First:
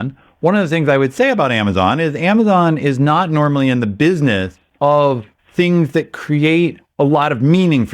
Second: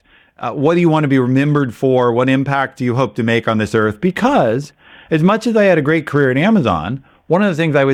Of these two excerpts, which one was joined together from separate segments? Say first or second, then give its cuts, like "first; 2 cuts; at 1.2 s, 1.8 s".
first; 3 cuts; at 4.6 s, 5.4 s, 6.8 s